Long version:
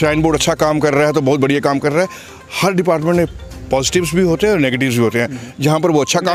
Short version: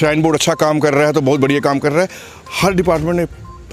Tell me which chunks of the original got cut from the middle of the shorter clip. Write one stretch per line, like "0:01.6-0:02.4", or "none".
none